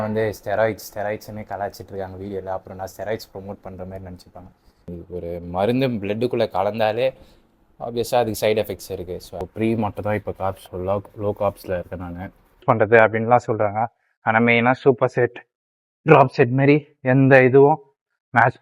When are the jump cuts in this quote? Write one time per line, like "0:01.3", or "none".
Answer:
0:04.9
0:09.4
0:12.6